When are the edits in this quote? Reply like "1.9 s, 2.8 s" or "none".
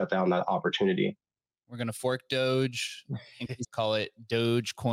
3.7 s